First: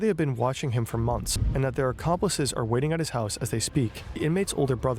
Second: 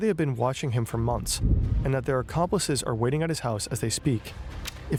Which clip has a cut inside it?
first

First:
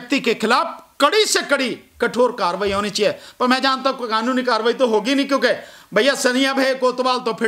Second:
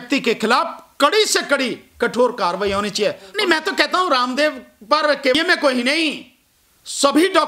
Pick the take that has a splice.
second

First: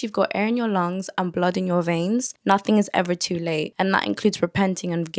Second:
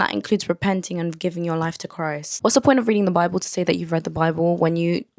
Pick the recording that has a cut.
second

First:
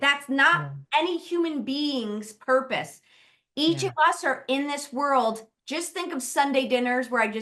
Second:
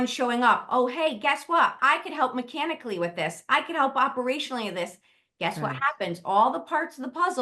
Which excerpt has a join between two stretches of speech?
second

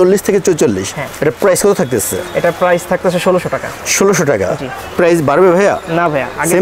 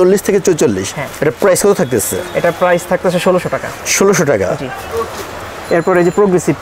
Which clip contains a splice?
first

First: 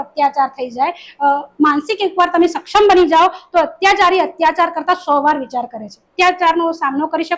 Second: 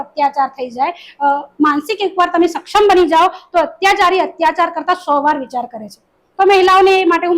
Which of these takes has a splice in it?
first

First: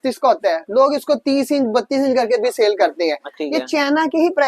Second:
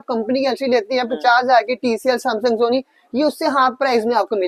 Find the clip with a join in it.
first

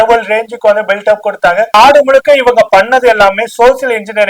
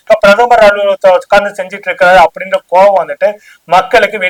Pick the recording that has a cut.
first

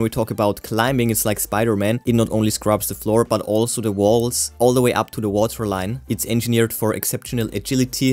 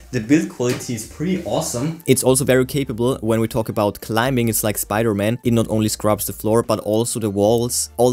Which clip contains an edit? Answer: second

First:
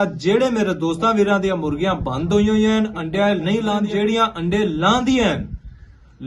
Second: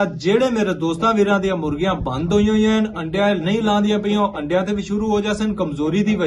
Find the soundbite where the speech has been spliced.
first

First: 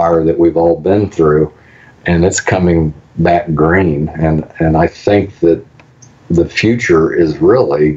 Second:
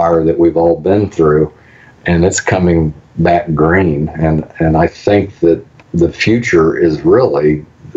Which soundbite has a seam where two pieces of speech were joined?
second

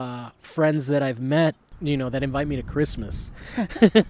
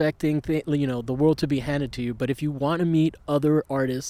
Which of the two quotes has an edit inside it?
first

